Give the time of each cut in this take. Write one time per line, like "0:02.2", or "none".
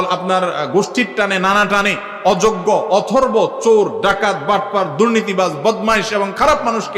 none